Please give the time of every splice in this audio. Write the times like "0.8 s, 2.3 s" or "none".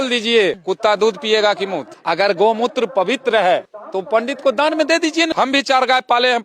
1.9 s, 4.0 s, 5.3 s